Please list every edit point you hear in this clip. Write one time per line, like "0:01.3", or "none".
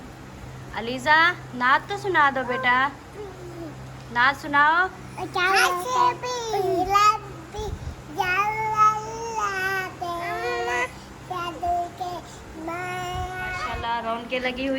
0:13.7